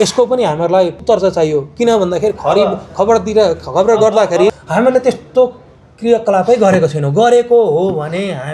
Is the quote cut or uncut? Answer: cut